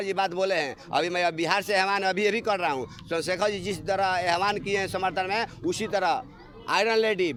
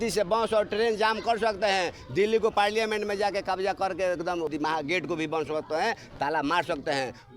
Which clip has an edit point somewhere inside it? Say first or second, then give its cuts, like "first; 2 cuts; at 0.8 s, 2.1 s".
second; 1 cut; at 4.5 s